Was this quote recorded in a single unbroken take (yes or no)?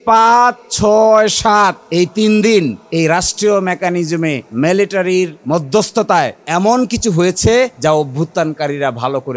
no